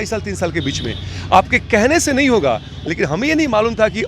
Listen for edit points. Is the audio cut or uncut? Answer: cut